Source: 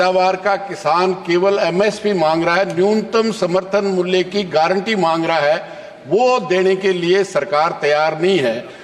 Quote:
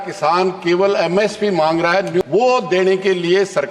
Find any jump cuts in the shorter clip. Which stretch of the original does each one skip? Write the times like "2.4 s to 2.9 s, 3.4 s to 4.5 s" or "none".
2.8 s to 6.0 s